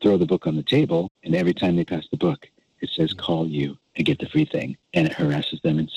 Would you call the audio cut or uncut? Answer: cut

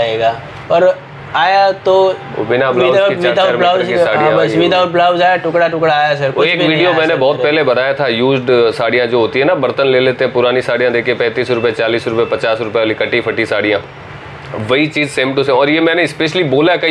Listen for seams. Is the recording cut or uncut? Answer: uncut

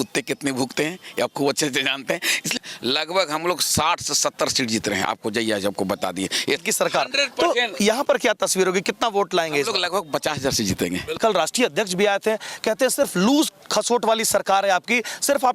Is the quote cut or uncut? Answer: cut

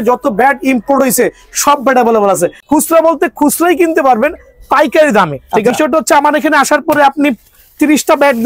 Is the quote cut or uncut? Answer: cut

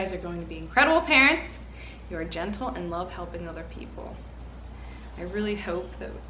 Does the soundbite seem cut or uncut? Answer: uncut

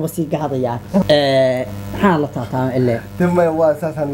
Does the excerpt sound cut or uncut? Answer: cut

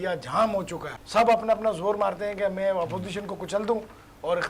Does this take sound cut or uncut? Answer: cut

